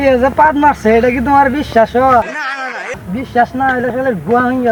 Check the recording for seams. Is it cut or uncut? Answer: uncut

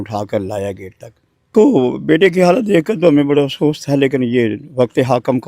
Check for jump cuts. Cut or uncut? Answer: cut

